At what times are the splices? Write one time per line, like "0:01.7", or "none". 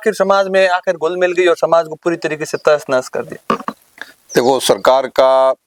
none